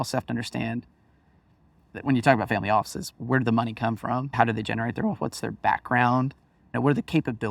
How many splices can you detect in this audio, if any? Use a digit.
0